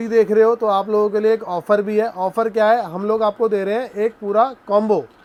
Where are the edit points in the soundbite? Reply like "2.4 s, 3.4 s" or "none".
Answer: none

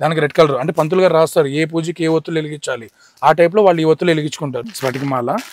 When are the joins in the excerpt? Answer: 4.6 s

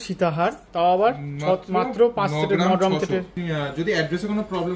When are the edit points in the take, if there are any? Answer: 3.3 s

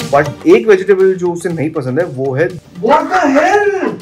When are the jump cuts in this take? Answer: 2.6 s

